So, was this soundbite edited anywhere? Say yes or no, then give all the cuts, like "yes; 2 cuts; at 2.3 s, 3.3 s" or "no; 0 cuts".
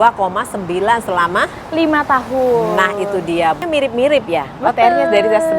yes; 1 cut; at 3.6 s